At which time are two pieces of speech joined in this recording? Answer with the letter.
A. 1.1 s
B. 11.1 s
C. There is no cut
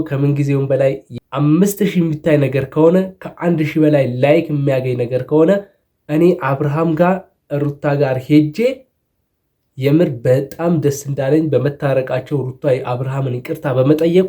A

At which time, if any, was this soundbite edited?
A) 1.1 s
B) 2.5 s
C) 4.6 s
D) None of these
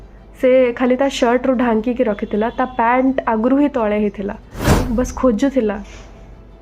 C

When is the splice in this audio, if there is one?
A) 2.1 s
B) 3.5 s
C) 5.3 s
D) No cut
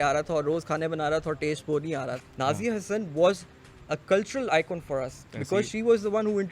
A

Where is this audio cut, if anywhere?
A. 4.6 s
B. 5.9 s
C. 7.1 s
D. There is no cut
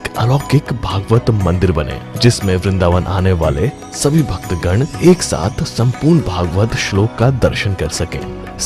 D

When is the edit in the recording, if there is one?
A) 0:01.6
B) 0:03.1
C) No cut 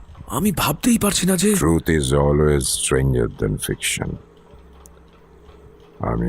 A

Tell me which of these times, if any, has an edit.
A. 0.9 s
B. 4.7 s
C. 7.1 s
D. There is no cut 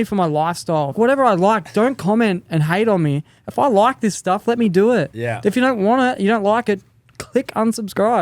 A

